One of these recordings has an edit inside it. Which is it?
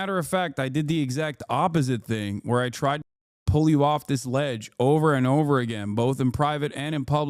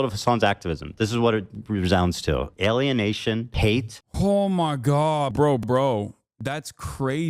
second; 3 cuts; at 3.9 s, 5.3 s, 6.3 s

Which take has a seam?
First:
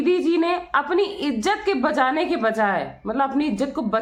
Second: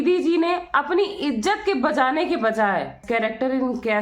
second; 1 cut; at 3.0 s

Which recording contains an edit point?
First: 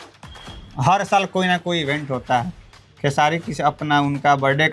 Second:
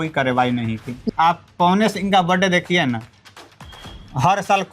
second; 1 cut; at 1.1 s

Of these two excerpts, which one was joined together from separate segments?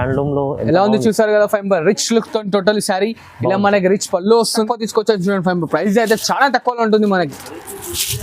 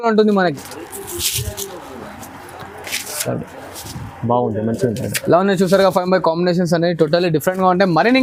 first; 1 cut; at 4.5 s

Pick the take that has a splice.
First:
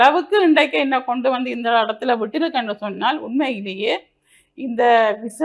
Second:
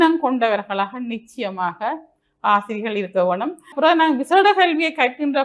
second; 1 cut; at 3.7 s

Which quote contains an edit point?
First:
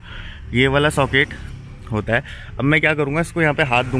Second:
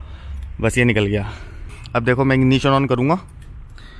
second; 1 cut; at 1.7 s

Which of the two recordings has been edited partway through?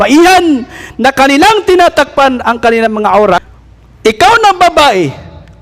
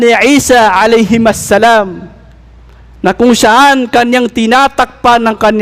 first; 1 cut; at 3.4 s

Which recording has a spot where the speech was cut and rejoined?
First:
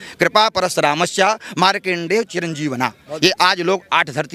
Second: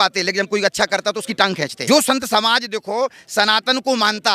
second; 1 cut; at 1.7 s

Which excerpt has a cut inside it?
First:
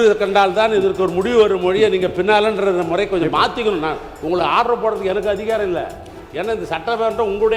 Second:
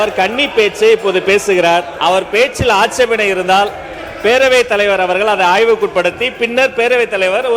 second; 1 cut; at 1.9 s

